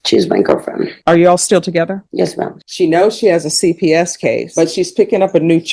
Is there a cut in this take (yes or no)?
yes